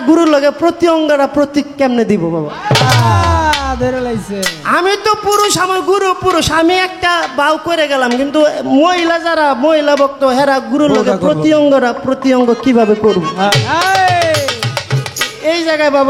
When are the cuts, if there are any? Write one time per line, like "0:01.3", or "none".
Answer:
none